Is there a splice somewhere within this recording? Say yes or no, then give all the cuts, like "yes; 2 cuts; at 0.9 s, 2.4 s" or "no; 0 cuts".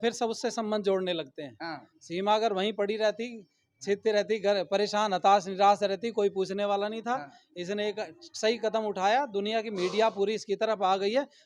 no; 0 cuts